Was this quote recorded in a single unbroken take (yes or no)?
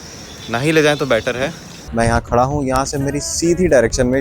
no